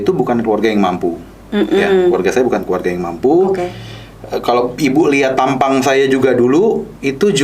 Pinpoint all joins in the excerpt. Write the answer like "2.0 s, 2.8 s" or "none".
none